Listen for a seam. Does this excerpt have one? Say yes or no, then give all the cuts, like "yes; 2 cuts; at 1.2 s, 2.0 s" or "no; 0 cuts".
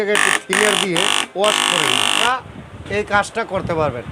yes; 1 cut; at 2.2 s